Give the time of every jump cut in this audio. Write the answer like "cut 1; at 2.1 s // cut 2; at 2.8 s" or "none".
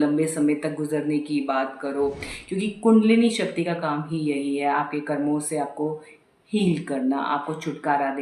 cut 1; at 2.4 s